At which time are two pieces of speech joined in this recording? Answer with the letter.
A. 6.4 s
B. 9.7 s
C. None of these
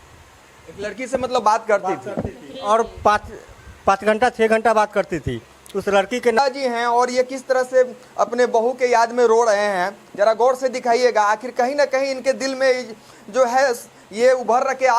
A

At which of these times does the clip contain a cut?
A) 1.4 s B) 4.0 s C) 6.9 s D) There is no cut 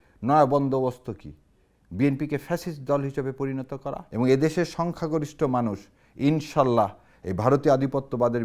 B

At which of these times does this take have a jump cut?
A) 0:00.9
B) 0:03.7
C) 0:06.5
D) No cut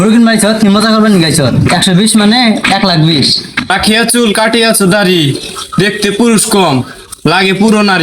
B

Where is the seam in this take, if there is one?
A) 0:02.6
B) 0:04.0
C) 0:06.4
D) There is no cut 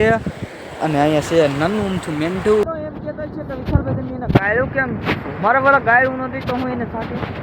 A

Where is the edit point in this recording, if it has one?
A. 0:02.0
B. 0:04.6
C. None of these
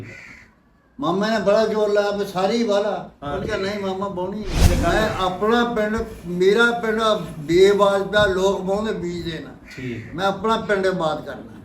B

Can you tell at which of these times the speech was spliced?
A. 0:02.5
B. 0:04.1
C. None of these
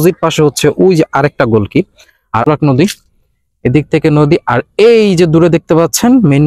A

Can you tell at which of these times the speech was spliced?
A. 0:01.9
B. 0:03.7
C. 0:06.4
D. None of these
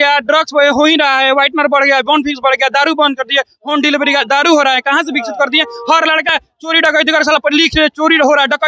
D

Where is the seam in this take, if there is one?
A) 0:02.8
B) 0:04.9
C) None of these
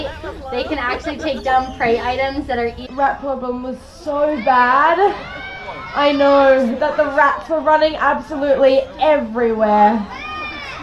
A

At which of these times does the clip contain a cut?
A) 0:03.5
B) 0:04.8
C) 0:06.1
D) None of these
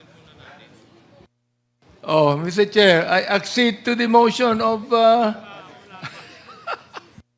D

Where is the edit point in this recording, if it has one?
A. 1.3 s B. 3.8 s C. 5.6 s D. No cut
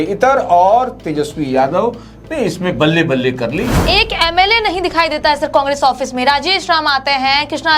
B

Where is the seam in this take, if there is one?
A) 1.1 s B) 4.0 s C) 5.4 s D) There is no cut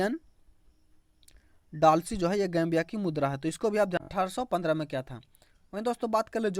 B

